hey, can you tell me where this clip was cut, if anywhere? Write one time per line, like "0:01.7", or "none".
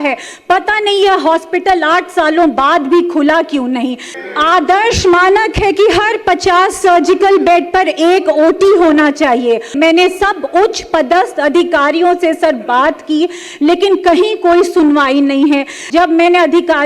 0:04.1
0:09.7
0:15.8